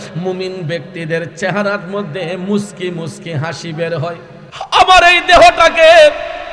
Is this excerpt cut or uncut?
cut